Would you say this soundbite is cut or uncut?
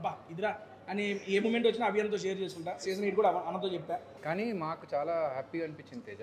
cut